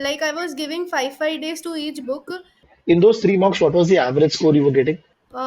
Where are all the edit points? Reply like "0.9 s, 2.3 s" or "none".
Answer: 2.7 s